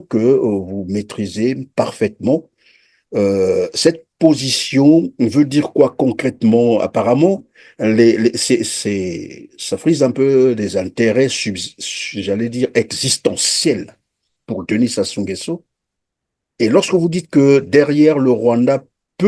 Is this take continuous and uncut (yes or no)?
yes